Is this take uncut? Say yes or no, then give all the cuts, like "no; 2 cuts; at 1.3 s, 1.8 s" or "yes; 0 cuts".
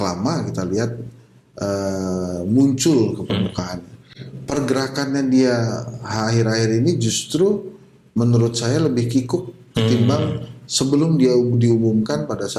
yes; 0 cuts